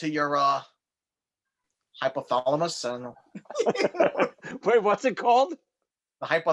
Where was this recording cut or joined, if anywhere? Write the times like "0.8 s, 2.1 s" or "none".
none